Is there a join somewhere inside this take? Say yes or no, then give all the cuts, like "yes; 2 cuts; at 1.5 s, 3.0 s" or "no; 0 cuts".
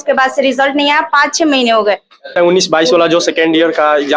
yes; 1 cut; at 2.4 s